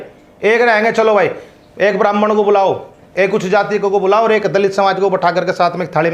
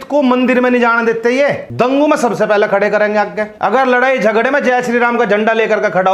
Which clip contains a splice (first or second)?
second